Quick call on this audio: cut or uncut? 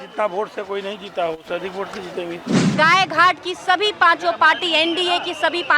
cut